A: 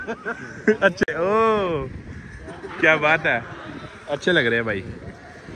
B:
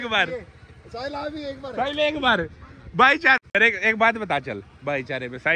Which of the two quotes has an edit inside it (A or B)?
B